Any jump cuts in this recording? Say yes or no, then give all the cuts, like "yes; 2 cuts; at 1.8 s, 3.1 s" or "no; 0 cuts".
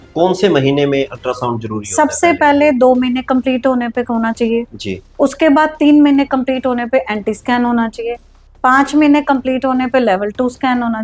no; 0 cuts